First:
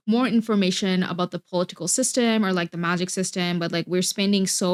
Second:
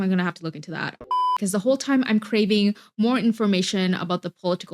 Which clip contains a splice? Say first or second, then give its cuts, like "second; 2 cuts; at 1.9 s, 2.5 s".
second; 1 cut; at 1.0 s